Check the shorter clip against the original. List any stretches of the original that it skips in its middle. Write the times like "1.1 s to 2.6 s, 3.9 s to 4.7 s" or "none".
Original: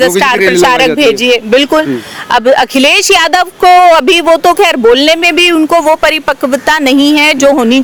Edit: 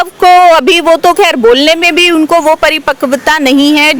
none